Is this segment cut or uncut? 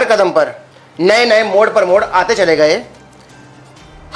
uncut